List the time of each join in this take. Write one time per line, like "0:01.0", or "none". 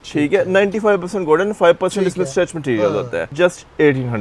0:03.3

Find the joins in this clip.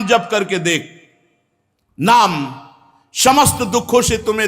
none

